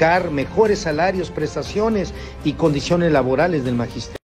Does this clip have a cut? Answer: yes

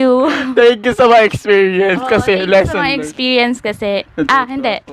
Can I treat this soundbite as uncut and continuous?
yes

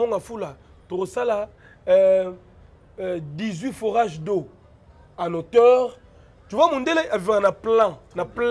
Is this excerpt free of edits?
yes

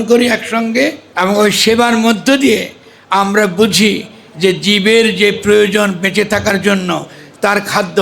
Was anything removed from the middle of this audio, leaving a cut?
yes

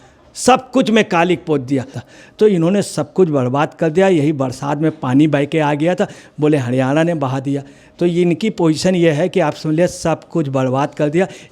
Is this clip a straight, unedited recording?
no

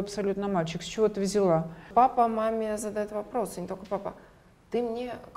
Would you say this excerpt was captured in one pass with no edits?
no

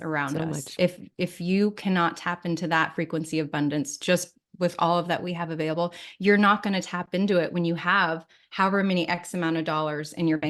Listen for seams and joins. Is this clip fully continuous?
yes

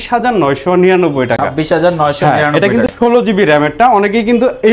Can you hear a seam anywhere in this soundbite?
no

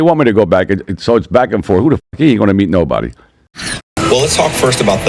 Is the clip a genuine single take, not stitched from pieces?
no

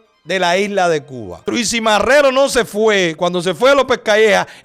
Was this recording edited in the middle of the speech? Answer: yes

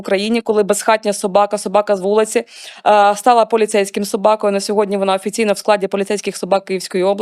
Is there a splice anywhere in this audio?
no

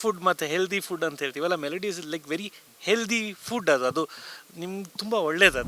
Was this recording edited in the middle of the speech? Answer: no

